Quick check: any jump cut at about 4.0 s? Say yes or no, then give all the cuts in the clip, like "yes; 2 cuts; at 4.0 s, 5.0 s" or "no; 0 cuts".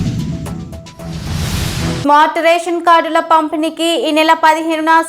no; 1 cut; at 2.0 s